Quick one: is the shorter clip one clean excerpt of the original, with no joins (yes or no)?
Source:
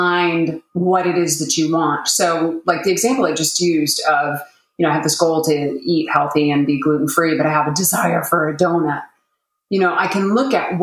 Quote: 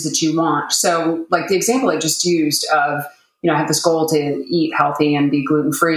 yes